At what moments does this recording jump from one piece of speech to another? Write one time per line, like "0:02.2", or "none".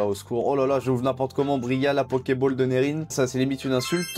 0:03.1